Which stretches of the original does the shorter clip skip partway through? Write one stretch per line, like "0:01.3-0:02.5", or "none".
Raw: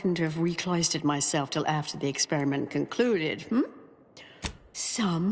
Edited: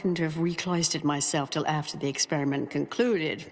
none